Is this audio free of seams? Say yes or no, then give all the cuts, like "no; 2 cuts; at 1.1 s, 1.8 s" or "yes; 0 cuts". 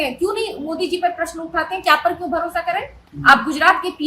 yes; 0 cuts